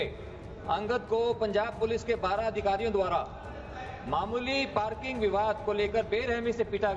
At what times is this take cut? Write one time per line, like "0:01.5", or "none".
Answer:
none